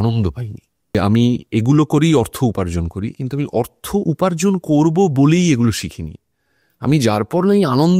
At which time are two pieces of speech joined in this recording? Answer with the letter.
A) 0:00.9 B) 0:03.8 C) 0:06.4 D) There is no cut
A